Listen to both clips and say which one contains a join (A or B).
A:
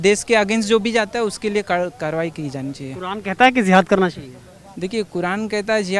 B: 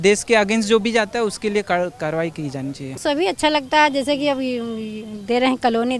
B